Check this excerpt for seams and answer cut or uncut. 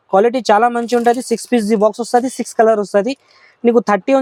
uncut